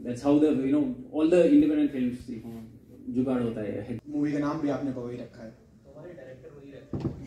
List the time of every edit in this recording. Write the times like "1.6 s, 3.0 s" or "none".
3.9 s